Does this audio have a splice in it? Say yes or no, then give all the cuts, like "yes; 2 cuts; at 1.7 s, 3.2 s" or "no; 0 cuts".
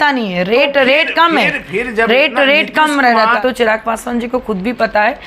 yes; 1 cut; at 3.4 s